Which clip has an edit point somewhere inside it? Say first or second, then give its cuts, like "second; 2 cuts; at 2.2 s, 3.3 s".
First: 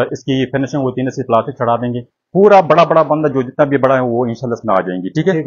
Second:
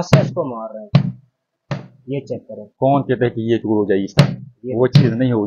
first; 1 cut; at 2.1 s